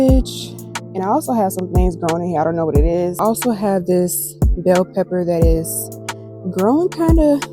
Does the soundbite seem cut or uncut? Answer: cut